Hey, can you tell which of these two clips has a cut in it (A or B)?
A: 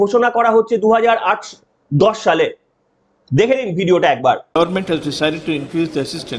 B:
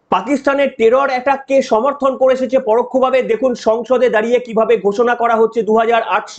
A